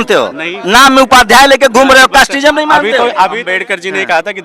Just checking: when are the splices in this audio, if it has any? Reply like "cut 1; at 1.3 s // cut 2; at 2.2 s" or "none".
cut 1; at 3.4 s